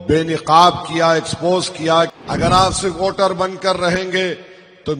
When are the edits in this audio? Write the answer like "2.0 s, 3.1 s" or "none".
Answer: 2.1 s